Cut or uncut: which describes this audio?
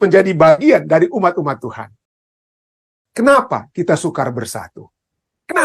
cut